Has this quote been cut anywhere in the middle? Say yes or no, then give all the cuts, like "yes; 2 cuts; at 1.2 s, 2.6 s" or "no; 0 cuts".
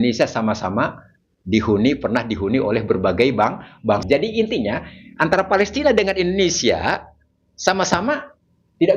yes; 1 cut; at 4.0 s